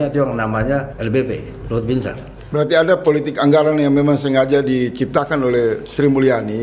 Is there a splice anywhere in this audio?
yes; 2 cuts; at 0.9 s, 2.3 s

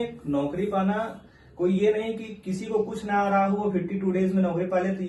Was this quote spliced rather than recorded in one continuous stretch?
no; 0 cuts

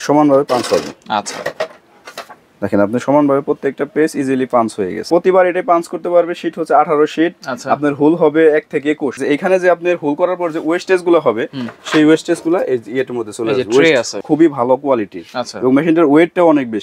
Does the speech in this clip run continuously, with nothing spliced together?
no; 3 cuts; at 5.1 s, 9.2 s, 14.2 s

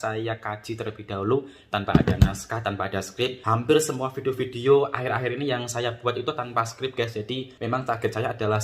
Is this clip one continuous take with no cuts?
no; 2 cuts; at 3.4 s, 7.5 s

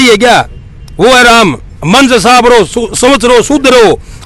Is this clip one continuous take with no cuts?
yes; 0 cuts

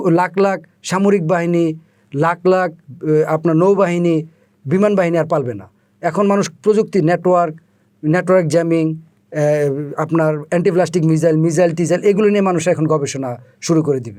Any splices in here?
no; 0 cuts

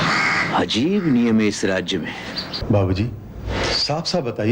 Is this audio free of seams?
no; 1 cut; at 2.5 s

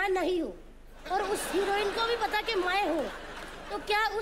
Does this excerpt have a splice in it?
yes; 1 cut; at 1.0 s

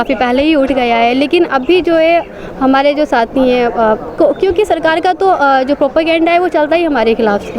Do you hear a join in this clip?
no; 0 cuts

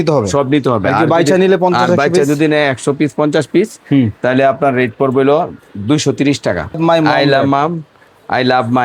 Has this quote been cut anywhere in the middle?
yes; 1 cut; at 6.8 s

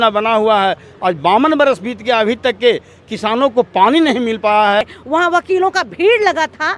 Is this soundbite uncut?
no; 1 cut; at 5.0 s

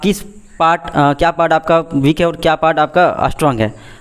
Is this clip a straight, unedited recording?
yes; 0 cuts

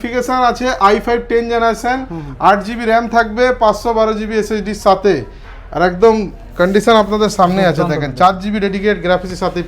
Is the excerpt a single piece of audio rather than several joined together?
yes; 0 cuts

